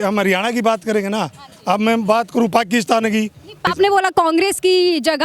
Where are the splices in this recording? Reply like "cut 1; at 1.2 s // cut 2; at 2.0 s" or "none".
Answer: cut 1; at 3.7 s